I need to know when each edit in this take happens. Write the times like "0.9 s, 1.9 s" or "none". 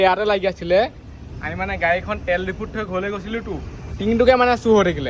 none